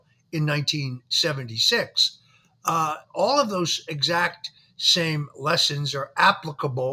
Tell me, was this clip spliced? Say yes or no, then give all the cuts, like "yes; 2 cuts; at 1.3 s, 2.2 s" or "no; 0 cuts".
no; 0 cuts